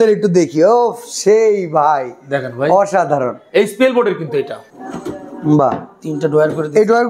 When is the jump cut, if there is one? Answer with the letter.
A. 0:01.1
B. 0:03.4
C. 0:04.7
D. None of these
C